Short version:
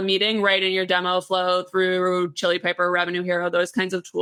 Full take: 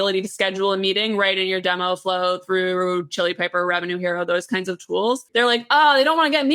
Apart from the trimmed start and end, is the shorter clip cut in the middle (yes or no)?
no